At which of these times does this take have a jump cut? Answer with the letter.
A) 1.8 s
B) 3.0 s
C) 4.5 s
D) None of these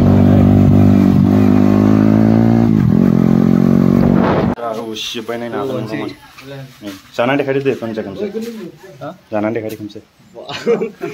C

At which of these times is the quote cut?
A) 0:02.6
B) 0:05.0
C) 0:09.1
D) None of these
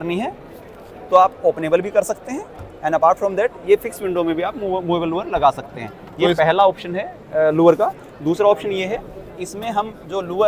D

